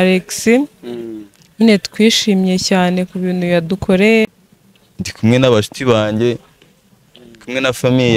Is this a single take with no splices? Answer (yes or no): no